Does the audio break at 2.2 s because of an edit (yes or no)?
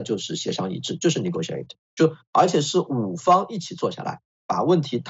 no